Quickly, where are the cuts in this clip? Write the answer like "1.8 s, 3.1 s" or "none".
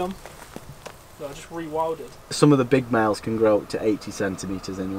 2.3 s

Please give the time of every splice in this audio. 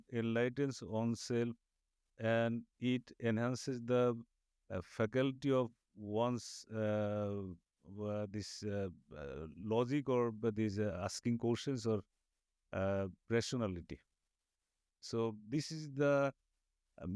none

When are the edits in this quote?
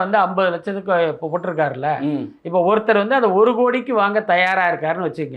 none

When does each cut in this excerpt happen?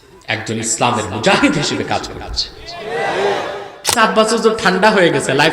4.0 s

